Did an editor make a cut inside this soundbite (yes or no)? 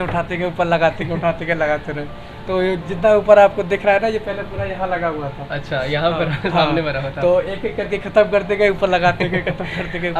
no